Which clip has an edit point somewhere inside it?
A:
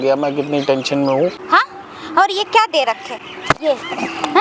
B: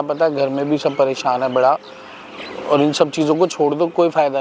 A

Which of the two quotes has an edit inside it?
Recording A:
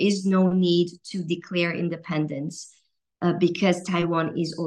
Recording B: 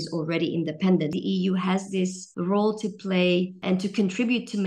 B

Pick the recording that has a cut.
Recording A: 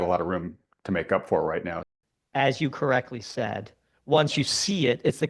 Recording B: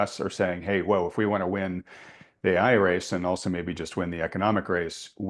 A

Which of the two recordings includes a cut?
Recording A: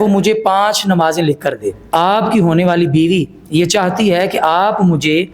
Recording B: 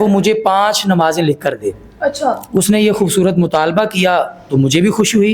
A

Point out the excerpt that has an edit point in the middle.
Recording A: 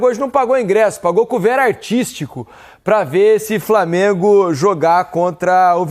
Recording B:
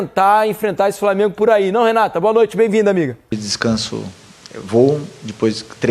B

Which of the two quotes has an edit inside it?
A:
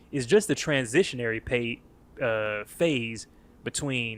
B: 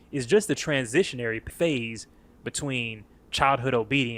B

